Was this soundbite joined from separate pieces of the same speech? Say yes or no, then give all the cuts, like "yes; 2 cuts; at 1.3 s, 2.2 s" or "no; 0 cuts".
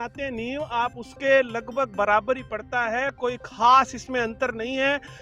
no; 0 cuts